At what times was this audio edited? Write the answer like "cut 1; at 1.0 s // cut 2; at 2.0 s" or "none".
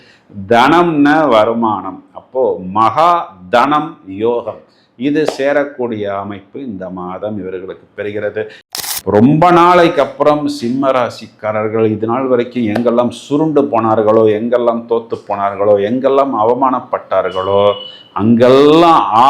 cut 1; at 8.6 s